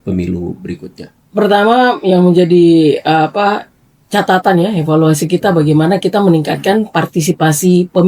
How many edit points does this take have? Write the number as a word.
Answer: zero